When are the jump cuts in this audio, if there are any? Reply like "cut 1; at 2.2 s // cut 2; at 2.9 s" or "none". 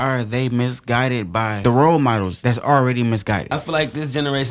cut 1; at 1.6 s // cut 2; at 2.3 s // cut 3; at 3.5 s